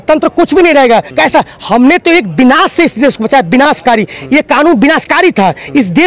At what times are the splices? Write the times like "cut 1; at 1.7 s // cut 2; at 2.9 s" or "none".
cut 1; at 1.1 s